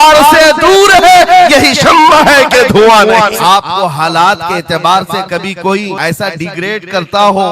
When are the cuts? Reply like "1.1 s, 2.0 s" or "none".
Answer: 3.4 s, 6.0 s

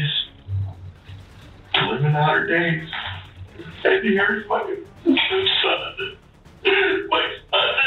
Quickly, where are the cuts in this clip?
none

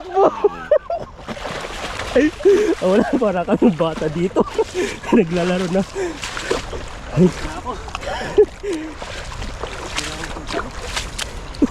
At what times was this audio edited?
none

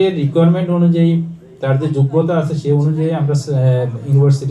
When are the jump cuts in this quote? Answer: none

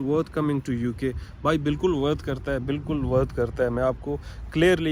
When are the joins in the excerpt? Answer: none

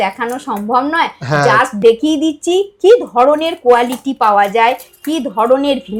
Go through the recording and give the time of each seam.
none

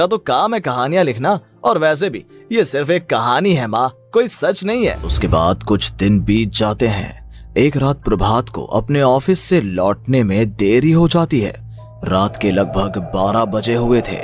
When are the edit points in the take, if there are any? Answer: 5.1 s

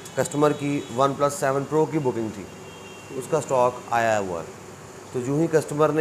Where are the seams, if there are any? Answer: none

